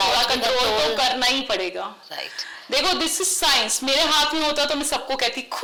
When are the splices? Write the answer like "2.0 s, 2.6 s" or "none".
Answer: none